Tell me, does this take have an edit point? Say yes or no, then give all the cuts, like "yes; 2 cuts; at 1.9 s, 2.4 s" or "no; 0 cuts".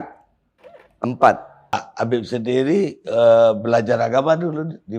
yes; 1 cut; at 1.9 s